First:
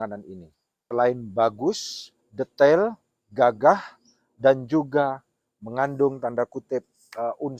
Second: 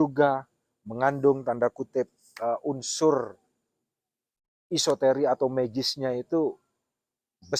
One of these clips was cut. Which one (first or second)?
first